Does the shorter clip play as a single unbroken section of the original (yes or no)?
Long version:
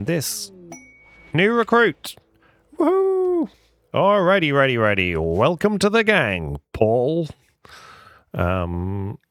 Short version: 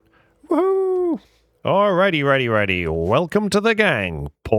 yes